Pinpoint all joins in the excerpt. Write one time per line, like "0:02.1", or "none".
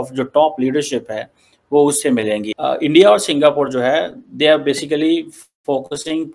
none